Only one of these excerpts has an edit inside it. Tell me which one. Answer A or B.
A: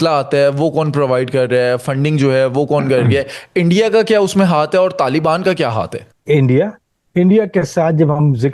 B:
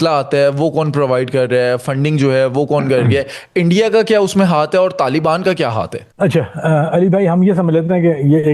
A